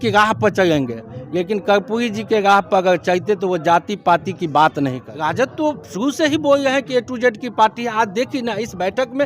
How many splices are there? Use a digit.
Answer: 1